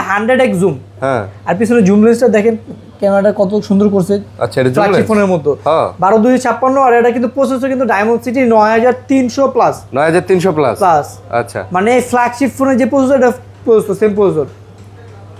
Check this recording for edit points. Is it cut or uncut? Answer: uncut